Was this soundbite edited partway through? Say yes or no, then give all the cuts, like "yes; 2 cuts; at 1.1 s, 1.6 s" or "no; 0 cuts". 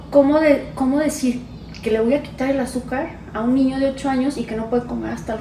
no; 0 cuts